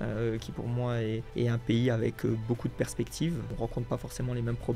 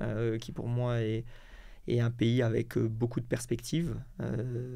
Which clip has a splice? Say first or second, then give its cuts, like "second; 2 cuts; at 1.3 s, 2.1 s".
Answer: first; 2 cuts; at 1.3 s, 3.5 s